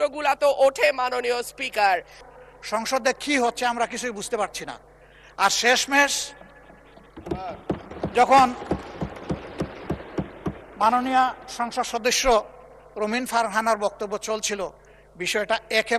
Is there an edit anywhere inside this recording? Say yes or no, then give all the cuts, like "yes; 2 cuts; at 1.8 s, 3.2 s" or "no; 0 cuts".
yes; 1 cut; at 2.3 s